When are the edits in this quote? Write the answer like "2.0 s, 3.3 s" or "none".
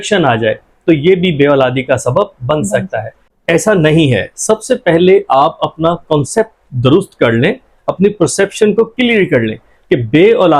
3.3 s